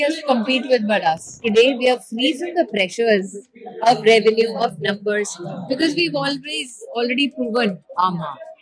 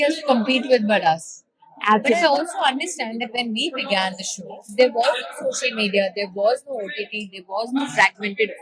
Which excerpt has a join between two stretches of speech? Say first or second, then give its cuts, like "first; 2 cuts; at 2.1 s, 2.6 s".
first; 1 cut; at 1.3 s